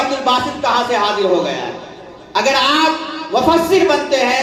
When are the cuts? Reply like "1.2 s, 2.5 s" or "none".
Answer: none

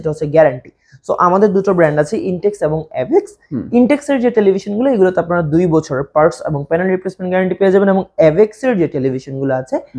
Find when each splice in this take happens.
none

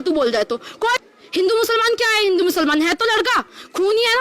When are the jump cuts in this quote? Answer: 0.9 s

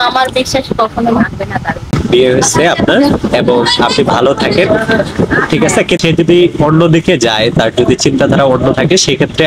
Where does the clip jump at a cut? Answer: 2.0 s

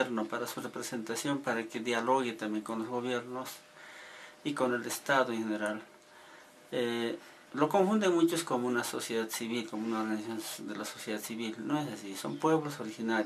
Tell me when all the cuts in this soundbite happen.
6.7 s

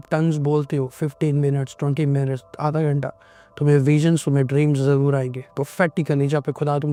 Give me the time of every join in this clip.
none

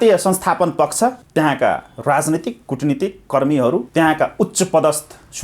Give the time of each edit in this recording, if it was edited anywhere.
1.2 s, 3.9 s

